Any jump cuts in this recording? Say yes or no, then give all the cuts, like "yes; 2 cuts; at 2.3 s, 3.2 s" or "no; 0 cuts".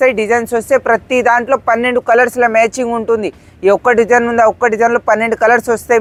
no; 0 cuts